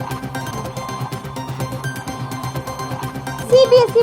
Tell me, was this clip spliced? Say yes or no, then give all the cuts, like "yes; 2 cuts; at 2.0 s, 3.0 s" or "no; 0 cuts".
no; 0 cuts